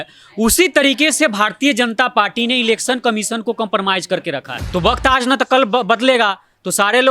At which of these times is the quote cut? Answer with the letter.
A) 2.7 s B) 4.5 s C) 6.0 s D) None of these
B